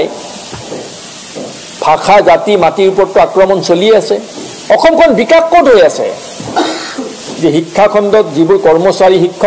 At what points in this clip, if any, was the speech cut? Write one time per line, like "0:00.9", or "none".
0:06.7

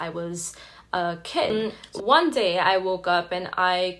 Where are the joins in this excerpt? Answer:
0:01.5

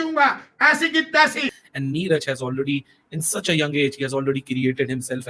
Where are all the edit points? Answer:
0:01.5

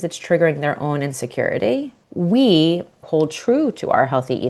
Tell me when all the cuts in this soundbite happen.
0:02.0
0:03.0

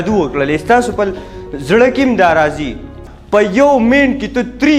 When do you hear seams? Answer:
0:03.1

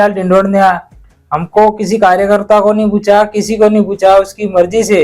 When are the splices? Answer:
0:01.0

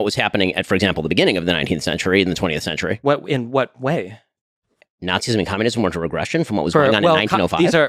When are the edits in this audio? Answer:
none

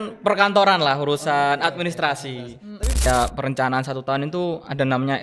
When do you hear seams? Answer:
0:03.1

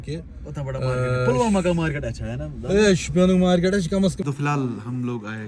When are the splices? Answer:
0:04.2

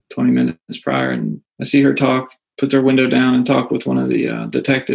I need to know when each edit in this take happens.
0:01.5

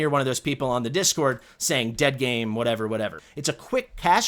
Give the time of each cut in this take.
0:03.2

